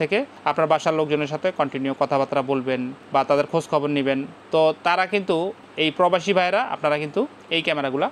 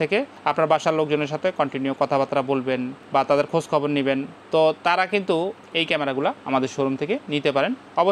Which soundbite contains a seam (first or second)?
second